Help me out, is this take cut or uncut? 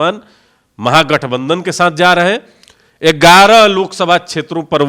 uncut